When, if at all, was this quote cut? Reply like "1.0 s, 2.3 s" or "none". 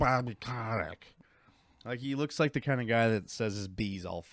none